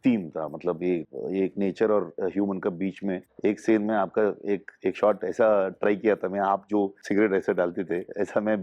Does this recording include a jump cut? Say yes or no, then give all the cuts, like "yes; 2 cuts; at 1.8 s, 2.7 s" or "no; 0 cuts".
yes; 3 cuts; at 1.1 s, 3.3 s, 7.0 s